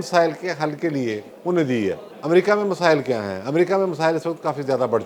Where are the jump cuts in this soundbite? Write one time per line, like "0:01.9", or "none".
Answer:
0:01.3
0:02.1